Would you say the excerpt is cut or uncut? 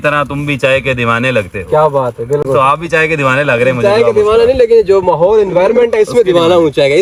uncut